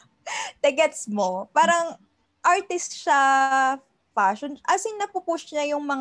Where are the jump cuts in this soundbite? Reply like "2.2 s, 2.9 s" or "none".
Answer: none